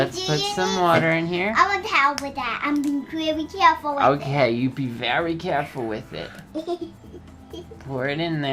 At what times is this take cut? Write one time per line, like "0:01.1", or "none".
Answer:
0:01.4